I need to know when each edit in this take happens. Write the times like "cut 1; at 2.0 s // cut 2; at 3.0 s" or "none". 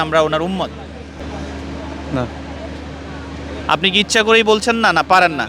cut 1; at 1.2 s